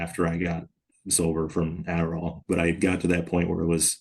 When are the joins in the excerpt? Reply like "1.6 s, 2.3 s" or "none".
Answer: 2.3 s